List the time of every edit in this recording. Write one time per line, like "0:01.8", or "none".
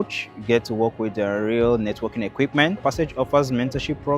0:02.8